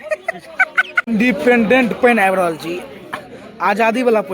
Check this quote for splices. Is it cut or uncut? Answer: cut